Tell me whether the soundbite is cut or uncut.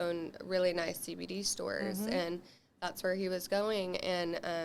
uncut